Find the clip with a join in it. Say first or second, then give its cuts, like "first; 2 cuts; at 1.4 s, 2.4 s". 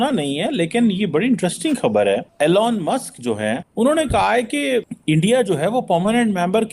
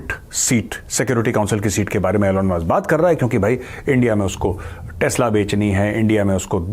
first; 3 cuts; at 2.3 s, 3.7 s, 4.9 s